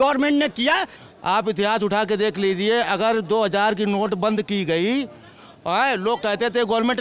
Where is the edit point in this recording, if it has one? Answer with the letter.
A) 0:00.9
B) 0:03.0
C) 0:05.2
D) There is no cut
A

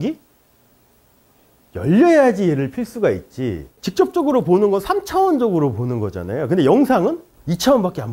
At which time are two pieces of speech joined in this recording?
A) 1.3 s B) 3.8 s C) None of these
B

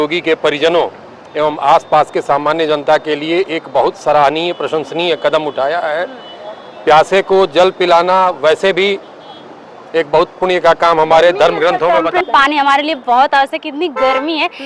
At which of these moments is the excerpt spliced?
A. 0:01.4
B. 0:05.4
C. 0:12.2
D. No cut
C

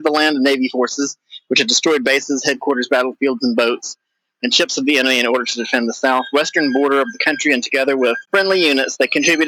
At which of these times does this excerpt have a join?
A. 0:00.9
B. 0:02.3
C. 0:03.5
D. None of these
D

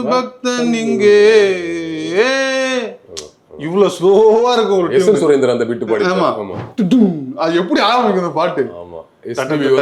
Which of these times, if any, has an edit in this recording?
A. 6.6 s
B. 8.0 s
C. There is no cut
A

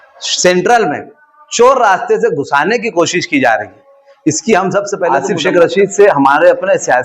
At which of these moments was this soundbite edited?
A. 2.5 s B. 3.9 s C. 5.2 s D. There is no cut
C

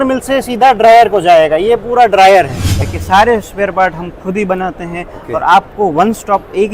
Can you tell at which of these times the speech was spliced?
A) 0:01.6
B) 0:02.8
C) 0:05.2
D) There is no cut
B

